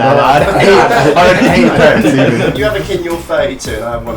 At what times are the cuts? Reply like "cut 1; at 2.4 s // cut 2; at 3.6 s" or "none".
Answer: cut 1; at 2.5 s